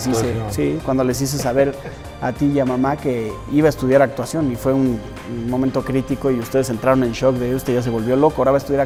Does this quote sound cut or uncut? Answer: uncut